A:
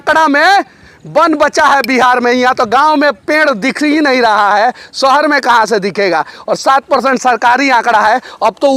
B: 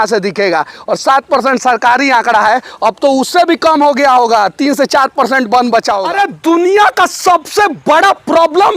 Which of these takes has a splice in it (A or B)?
B